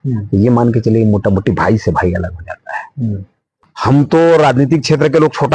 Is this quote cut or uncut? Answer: cut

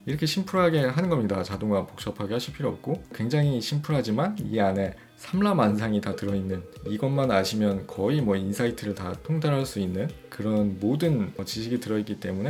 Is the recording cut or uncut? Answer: uncut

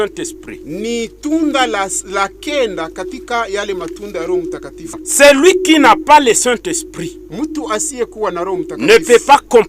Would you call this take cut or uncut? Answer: cut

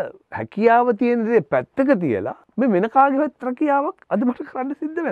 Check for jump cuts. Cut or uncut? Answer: cut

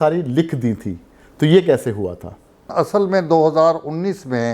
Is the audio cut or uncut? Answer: cut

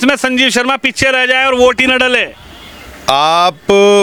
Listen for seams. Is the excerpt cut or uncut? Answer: uncut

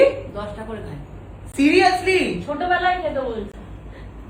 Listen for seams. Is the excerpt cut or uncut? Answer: uncut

